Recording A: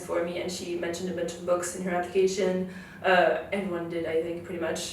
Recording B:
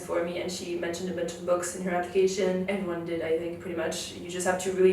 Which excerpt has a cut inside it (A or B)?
B